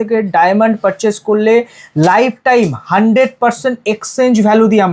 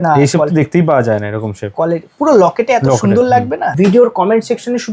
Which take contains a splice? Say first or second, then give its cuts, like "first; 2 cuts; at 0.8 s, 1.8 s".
second; 1 cut; at 3.7 s